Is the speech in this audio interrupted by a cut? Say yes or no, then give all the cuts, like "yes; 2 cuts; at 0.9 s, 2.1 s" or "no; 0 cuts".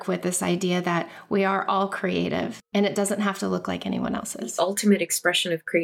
yes; 2 cuts; at 2.6 s, 4.4 s